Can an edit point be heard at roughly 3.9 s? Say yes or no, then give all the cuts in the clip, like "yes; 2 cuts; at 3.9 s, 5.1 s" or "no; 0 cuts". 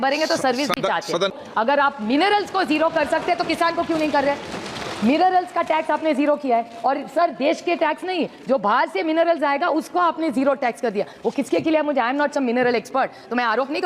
no; 1 cut; at 1.4 s